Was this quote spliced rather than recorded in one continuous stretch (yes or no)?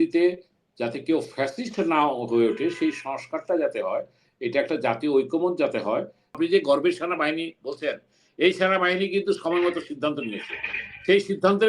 yes